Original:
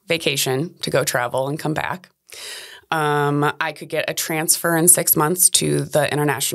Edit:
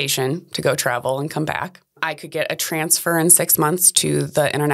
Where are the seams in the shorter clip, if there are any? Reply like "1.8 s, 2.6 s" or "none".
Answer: 2.1 s